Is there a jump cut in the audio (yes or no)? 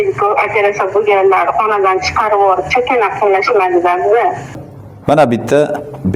yes